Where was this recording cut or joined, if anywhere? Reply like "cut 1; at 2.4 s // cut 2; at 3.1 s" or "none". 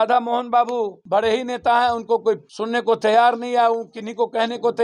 cut 1; at 1.0 s // cut 2; at 2.5 s

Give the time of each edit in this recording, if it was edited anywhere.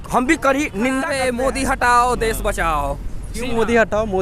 cut 1; at 1.1 s

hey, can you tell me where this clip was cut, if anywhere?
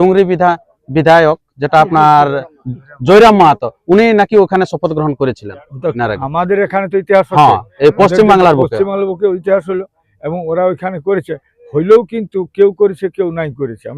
none

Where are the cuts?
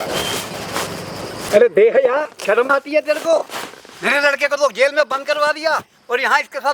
cut 1; at 1.5 s // cut 2; at 2.3 s

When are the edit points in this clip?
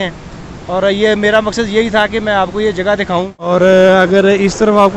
cut 1; at 3.4 s

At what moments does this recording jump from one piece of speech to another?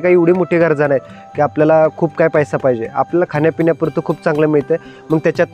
none

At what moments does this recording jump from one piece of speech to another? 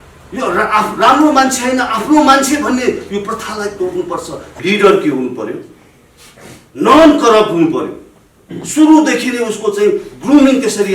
cut 1; at 4.5 s

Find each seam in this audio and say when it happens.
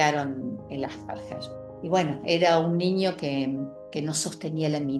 cut 1; at 1.6 s

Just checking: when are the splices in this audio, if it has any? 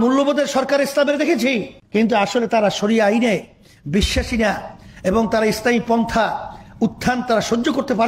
cut 1; at 1.8 s

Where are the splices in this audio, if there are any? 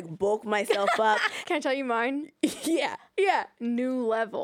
cut 1; at 1.3 s // cut 2; at 3.5 s

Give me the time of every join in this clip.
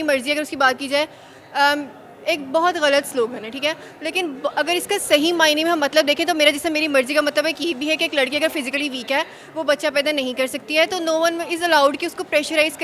none

